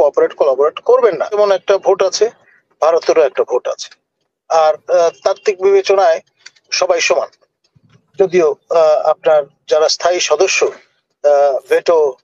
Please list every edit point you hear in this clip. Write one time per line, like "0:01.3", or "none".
0:01.4